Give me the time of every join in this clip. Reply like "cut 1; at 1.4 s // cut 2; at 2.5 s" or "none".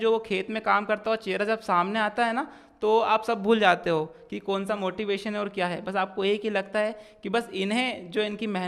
none